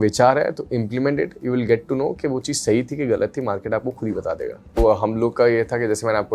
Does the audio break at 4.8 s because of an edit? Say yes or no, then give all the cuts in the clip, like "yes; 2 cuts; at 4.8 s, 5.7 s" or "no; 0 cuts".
yes; 1 cut; at 4.8 s